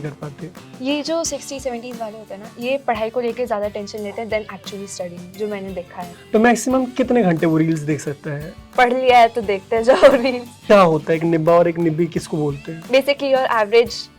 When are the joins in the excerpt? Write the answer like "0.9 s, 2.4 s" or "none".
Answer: 6.0 s, 10.5 s, 12.7 s